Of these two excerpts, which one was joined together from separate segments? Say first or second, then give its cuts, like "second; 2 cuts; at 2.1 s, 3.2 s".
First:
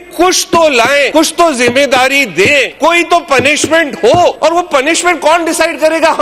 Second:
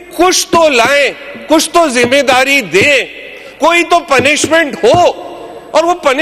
first; 3 cuts; at 1.1 s, 2.7 s, 4.4 s